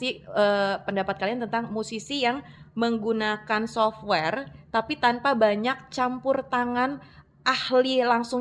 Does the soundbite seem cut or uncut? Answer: uncut